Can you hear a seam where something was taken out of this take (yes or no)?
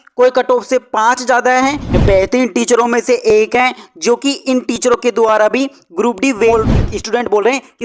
yes